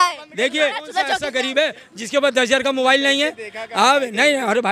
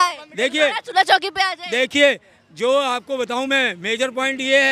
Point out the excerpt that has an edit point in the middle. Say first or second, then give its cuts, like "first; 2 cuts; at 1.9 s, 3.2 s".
first; 1 cut; at 1.2 s